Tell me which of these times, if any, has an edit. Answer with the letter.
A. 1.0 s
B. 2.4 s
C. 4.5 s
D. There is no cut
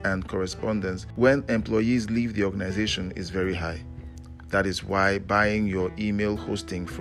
A